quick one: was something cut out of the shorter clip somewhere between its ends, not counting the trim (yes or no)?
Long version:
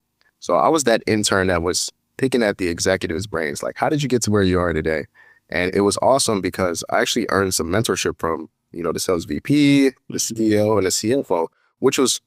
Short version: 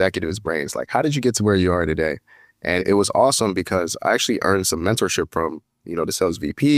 no